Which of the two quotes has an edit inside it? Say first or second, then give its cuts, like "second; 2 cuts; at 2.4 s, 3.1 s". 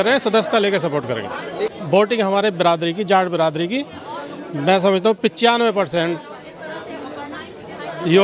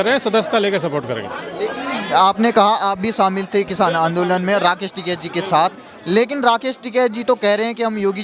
first; 1 cut; at 1.8 s